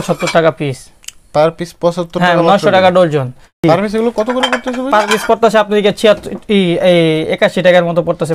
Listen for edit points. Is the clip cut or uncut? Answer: cut